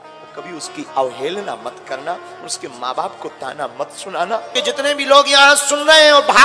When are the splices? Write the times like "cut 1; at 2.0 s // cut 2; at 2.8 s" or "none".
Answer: cut 1; at 4.6 s